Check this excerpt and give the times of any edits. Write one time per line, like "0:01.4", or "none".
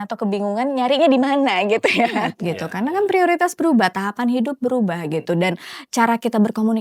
0:02.4